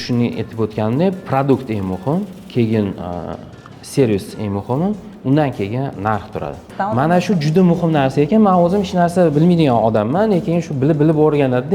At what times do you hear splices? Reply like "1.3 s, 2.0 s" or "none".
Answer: 6.7 s